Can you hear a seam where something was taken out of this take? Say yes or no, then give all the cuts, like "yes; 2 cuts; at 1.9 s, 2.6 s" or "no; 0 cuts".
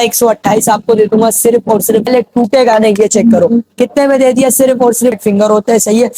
yes; 2 cuts; at 2.1 s, 5.2 s